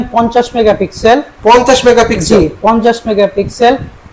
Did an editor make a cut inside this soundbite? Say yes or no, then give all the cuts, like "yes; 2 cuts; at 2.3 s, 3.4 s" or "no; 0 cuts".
no; 0 cuts